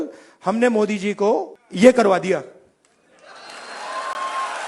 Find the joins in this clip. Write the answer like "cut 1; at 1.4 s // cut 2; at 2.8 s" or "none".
cut 1; at 1.6 s